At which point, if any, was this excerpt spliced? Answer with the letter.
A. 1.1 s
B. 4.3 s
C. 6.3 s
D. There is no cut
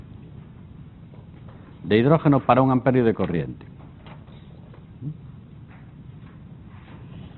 B